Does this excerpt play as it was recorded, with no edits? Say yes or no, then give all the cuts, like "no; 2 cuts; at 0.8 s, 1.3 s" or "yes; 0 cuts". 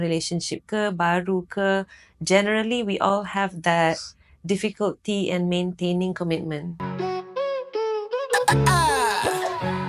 no; 1 cut; at 6.8 s